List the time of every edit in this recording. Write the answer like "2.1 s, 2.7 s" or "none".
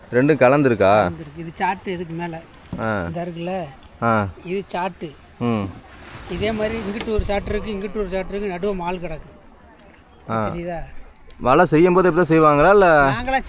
none